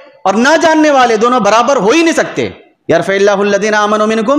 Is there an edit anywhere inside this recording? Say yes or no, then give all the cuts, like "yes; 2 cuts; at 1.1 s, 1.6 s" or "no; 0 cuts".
yes; 1 cut; at 2.7 s